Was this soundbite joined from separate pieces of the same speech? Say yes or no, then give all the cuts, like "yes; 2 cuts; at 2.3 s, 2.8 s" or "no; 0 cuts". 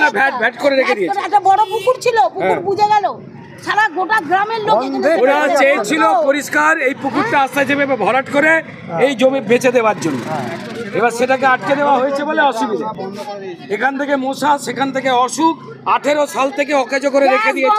no; 0 cuts